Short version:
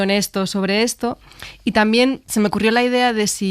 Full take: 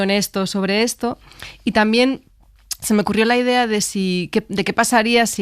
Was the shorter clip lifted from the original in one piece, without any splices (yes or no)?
no